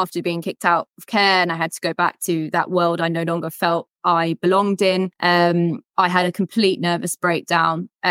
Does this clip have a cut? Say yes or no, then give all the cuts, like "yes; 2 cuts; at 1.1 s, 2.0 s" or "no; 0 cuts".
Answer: yes; 2 cuts; at 3.9 s, 5.1 s